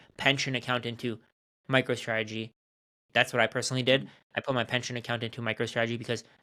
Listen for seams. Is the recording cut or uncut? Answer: uncut